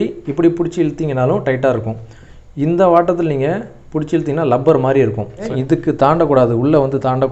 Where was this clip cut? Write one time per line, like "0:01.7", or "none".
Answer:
0:05.5